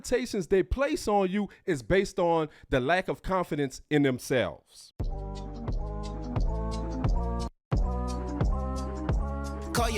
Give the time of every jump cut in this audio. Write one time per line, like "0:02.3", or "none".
0:04.9

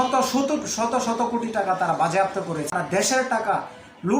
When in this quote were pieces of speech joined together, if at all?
0:02.7

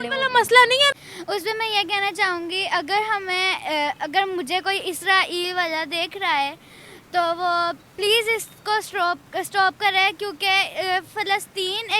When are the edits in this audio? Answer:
0:00.9

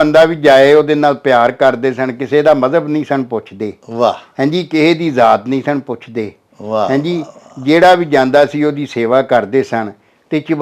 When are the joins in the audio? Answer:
none

